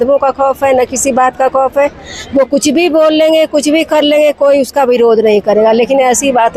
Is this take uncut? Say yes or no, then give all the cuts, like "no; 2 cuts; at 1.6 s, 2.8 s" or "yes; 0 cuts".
yes; 0 cuts